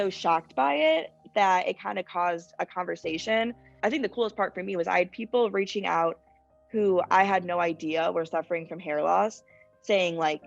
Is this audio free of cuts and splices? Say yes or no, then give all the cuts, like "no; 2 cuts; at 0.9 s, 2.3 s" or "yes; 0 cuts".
no; 1 cut; at 3.7 s